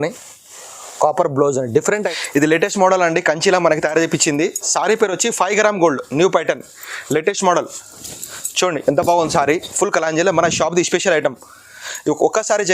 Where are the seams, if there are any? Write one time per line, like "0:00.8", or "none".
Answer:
0:01.9

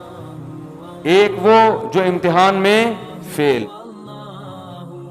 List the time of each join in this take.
0:03.8

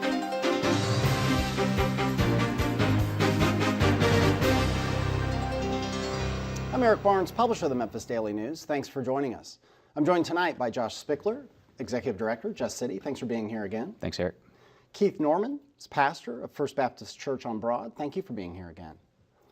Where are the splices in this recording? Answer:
0:17.1

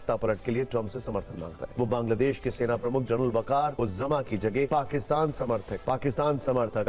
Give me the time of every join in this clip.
0:01.6
0:03.7
0:04.7

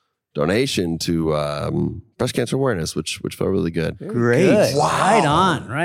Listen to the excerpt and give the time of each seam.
0:04.0

